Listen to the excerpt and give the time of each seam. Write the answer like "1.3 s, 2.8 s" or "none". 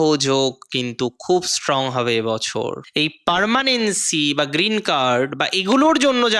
2.8 s